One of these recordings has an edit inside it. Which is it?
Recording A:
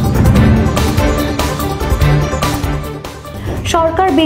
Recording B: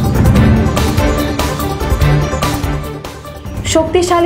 A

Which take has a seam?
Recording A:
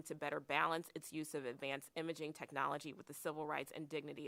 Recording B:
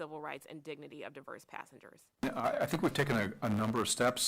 B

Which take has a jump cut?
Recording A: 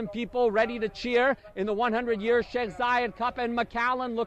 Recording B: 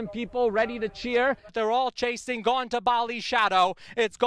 B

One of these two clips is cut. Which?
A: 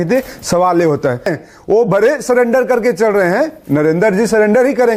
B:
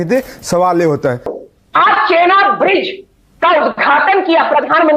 B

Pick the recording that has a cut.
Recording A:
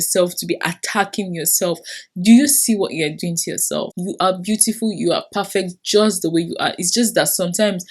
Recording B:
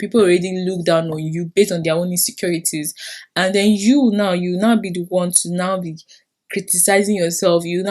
A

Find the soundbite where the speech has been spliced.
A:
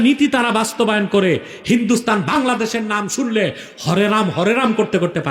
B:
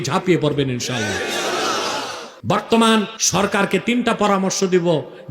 B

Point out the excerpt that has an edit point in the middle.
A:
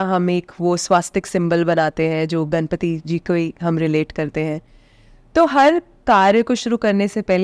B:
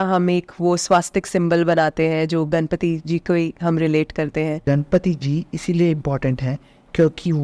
B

